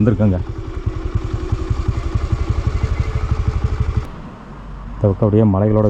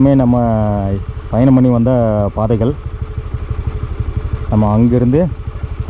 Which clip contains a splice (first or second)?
first